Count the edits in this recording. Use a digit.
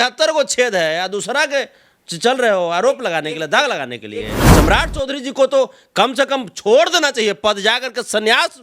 1